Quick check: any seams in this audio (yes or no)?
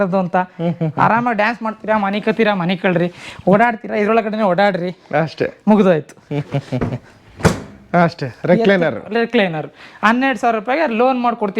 no